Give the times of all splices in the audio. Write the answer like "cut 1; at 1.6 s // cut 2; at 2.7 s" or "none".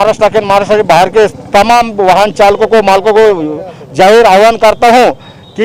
none